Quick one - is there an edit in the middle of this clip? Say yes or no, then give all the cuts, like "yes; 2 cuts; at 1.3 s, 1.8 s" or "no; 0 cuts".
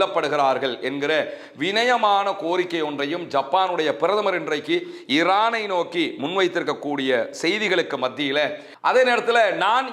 yes; 1 cut; at 8.7 s